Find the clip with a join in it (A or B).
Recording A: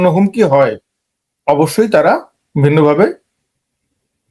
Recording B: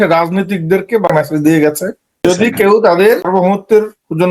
B